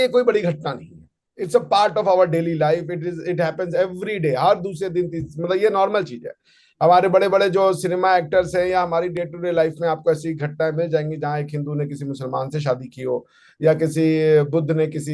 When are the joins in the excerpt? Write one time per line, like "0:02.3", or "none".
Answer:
none